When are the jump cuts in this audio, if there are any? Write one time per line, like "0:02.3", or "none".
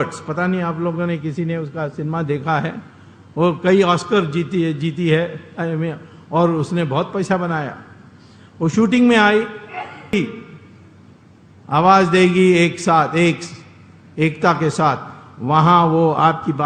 0:10.1